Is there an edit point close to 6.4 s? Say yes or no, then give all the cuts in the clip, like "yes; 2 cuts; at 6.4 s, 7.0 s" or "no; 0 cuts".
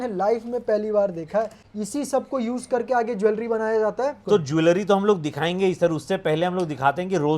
no; 2 cuts; at 1.6 s, 4.2 s